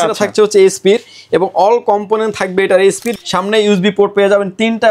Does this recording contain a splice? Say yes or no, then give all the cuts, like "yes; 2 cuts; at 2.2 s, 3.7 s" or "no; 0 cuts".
yes; 1 cut; at 3.1 s